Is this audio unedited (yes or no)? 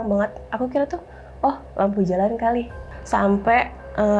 no